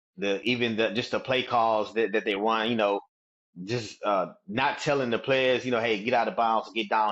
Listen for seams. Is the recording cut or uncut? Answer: uncut